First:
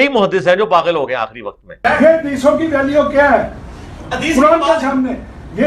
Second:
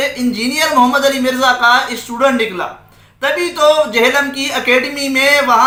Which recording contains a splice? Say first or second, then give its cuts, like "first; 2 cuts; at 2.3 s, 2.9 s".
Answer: first; 1 cut; at 1.7 s